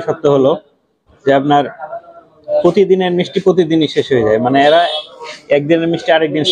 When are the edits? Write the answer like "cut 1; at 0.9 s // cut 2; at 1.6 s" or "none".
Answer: none